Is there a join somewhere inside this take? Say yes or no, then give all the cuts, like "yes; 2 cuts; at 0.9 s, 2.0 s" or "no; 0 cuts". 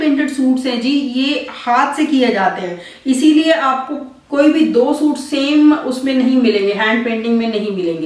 no; 0 cuts